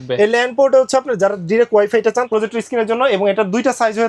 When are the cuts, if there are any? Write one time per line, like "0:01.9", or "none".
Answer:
0:02.3